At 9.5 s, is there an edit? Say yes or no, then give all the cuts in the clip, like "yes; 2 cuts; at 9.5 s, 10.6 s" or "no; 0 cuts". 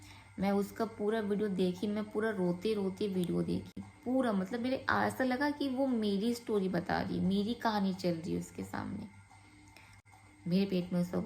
no; 0 cuts